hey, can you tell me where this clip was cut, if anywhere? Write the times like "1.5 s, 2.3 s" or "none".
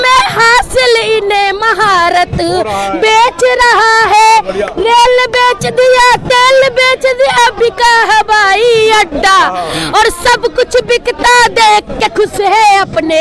none